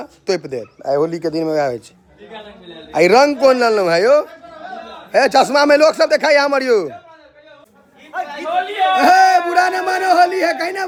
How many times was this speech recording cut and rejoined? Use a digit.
0